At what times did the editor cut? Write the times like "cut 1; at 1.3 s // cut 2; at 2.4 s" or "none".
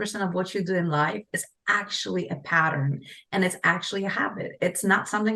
none